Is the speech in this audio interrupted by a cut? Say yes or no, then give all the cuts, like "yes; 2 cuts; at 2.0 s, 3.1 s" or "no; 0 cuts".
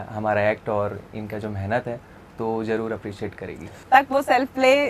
yes; 1 cut; at 3.8 s